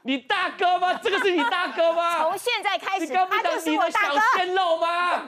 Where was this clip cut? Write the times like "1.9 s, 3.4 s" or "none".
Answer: none

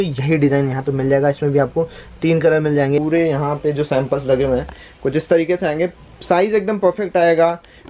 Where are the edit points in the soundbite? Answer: 3.0 s

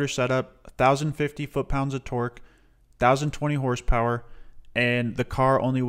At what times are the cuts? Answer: none

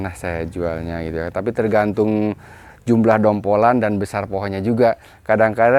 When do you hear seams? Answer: 2.7 s

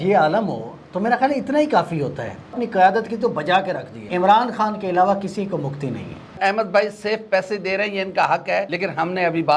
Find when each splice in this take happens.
2.6 s, 4.1 s, 6.4 s, 8.7 s

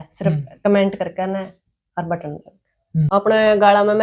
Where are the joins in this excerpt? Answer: 3.1 s

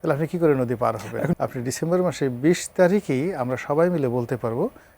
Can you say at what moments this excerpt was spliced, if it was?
1.4 s

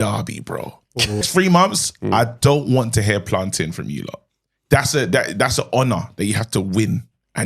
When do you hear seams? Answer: 1.2 s

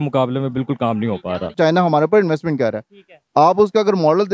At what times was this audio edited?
1.5 s

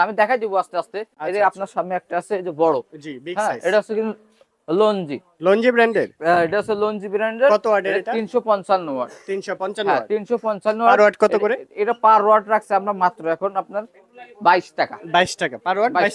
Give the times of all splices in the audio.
none

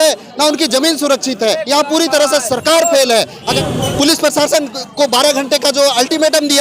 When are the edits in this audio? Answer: 1.6 s, 3.5 s

